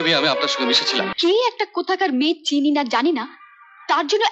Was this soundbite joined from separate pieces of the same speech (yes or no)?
yes